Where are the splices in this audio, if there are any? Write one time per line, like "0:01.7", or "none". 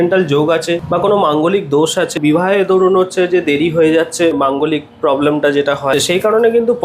0:00.8
0:02.2
0:04.4
0:05.9